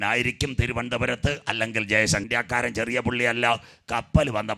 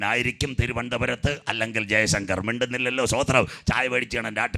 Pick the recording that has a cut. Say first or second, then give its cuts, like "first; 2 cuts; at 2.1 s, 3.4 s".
first; 1 cut; at 2.2 s